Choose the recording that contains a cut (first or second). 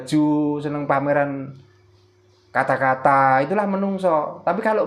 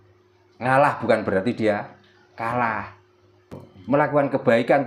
second